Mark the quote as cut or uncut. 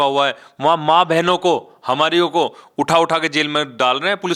uncut